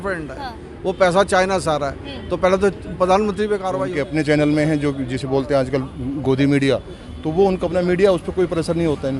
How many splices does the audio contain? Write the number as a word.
one